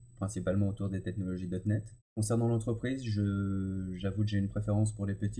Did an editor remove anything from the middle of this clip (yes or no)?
yes